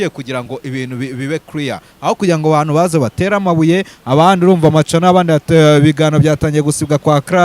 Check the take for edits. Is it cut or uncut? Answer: uncut